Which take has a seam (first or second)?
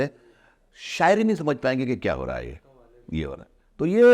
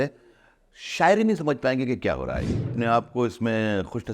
second